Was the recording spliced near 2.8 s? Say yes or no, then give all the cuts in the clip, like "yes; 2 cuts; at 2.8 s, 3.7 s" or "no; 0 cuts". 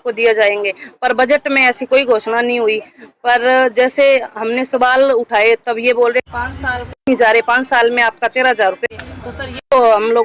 no; 0 cuts